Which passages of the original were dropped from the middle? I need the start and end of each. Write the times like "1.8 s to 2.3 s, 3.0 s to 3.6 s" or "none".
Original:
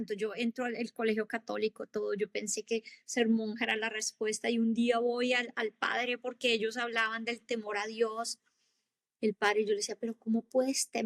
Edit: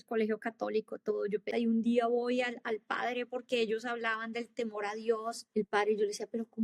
2.3 s to 4.4 s, 8.4 s to 9.1 s